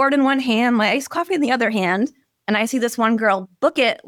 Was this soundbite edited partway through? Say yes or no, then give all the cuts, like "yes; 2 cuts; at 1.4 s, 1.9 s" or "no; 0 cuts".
no; 0 cuts